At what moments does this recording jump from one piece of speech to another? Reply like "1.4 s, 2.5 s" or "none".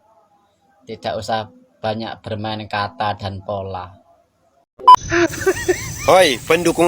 4.9 s